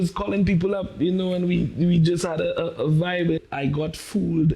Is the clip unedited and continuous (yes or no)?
no